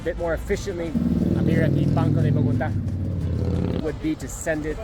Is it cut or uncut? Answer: cut